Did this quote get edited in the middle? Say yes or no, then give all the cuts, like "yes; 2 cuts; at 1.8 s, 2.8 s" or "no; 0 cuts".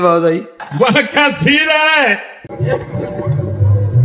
no; 0 cuts